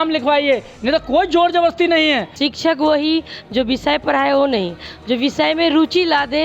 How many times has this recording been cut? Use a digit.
1